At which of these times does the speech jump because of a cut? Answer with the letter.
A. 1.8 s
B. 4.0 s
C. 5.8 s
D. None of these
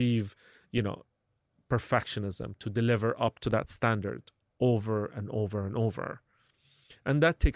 D